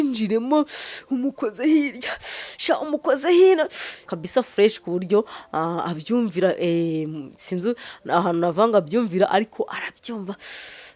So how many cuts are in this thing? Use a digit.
1